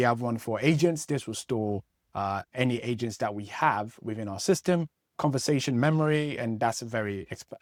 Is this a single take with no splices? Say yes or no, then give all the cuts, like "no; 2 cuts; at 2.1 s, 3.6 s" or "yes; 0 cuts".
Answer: yes; 0 cuts